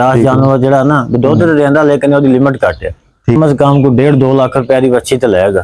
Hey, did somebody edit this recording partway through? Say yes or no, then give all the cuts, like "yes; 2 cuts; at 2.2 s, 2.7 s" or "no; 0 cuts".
yes; 1 cut; at 3.4 s